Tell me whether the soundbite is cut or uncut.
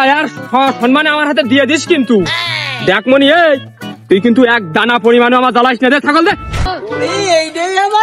cut